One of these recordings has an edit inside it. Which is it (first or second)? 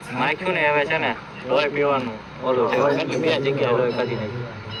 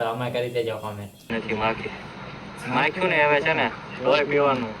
second